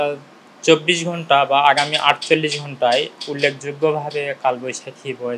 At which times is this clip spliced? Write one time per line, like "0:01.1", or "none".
none